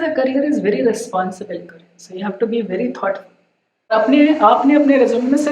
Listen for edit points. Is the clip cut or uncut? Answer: cut